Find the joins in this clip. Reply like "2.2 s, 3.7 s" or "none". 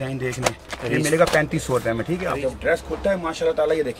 2.2 s